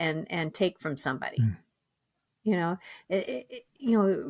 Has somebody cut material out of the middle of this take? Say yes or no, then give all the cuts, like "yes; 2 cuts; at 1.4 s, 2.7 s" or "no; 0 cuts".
no; 0 cuts